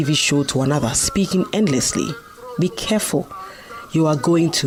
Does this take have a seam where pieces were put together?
no; 0 cuts

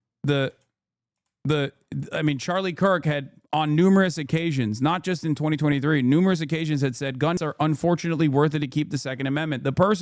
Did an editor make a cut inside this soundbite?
yes; 1 cut; at 7.4 s

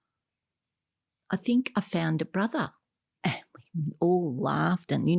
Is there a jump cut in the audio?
no; 0 cuts

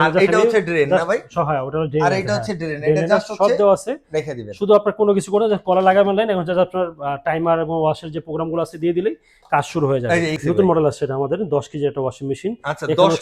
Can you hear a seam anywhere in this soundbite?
yes; 1 cut; at 10.4 s

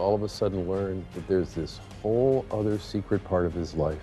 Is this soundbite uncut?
yes; 0 cuts

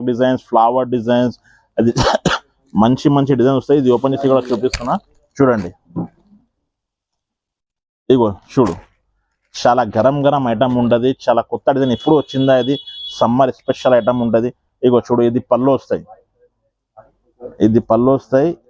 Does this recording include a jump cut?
no; 0 cuts

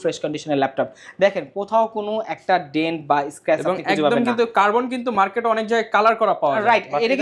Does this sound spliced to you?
no; 0 cuts

